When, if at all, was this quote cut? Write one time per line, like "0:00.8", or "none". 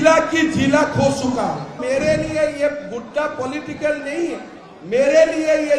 0:01.8